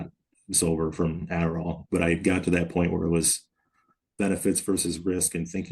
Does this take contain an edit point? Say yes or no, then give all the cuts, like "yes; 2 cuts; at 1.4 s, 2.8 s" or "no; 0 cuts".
yes; 1 cut; at 1.7 s